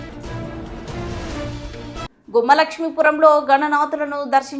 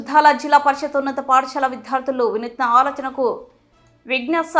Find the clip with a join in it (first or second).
first